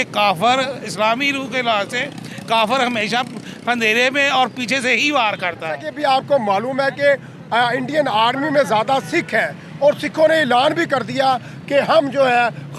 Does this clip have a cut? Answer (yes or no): yes